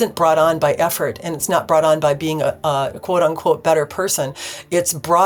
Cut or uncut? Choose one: uncut